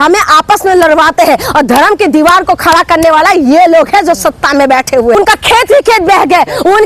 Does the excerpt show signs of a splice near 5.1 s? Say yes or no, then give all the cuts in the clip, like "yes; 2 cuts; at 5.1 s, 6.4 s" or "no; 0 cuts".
yes; 1 cut; at 5.1 s